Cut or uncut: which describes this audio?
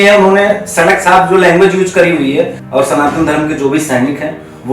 cut